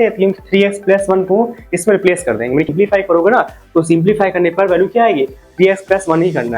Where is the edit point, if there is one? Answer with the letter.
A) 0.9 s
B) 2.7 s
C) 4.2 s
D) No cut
B